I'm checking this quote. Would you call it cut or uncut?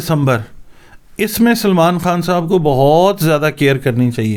uncut